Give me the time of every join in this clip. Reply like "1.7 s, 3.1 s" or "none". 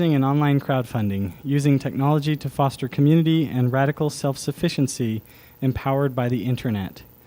5.1 s